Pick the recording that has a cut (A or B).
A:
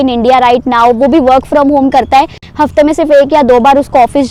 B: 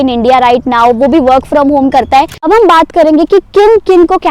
B